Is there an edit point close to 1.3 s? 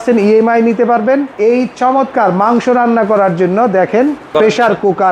yes; 2 cuts; at 1.3 s, 4.3 s

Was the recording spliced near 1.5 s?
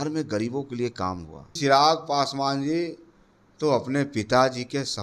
yes; 1 cut; at 1.5 s

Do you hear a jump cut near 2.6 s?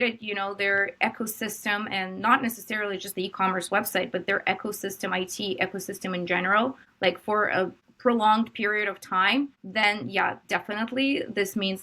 no; 3 cuts; at 6.9 s, 7.8 s, 9.6 s

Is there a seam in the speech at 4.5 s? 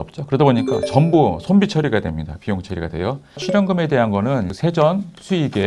yes; 2 cuts; at 3.4 s, 4.5 s

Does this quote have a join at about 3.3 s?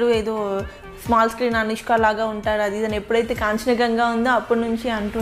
no; 0 cuts

